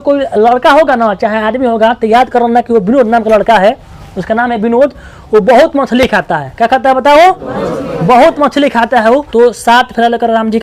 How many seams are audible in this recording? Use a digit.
1